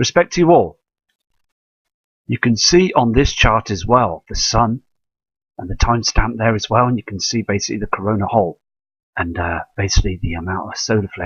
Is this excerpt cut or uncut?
cut